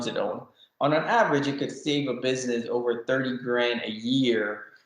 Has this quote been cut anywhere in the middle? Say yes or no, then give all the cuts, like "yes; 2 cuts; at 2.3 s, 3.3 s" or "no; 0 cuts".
no; 0 cuts